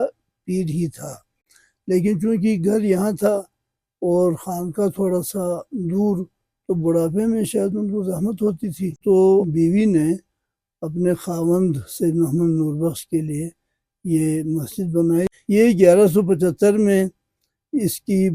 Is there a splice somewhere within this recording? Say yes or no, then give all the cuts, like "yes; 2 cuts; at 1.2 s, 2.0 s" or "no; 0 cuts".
yes; 2 cuts; at 9.0 s, 15.4 s